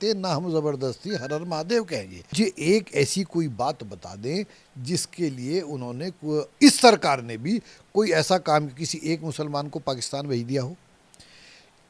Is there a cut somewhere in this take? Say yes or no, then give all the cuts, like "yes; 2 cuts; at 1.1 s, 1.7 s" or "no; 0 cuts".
yes; 1 cut; at 2.3 s